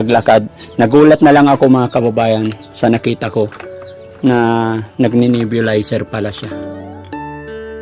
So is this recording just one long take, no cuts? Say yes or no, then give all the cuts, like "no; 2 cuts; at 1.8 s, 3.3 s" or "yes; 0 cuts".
no; 1 cut; at 6.6 s